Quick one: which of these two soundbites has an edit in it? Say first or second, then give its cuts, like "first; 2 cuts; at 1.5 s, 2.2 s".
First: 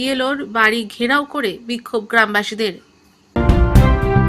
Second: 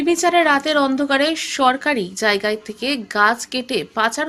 first; 1 cut; at 3.4 s